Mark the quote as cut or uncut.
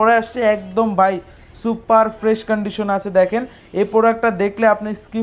uncut